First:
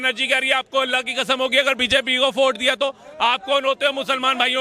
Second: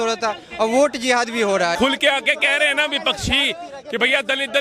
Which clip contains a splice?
second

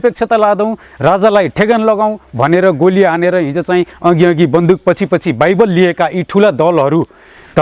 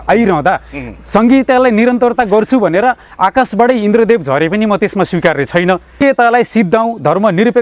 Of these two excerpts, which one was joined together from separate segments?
second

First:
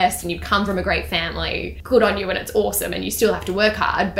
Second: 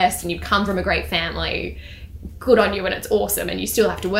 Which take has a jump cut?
first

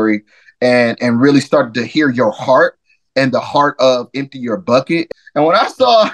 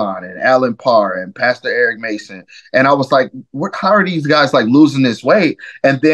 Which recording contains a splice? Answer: first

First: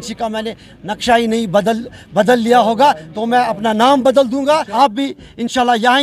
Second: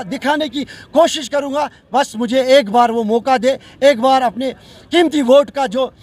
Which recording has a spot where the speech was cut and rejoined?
first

